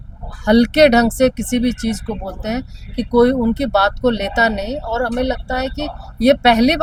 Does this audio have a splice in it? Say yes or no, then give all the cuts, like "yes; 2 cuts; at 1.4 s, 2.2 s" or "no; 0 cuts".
no; 0 cuts